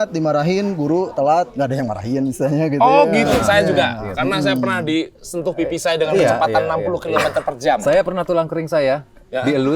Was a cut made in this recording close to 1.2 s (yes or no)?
no